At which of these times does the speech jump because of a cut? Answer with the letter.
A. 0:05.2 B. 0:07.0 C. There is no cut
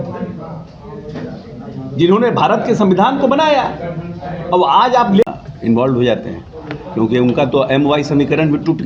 A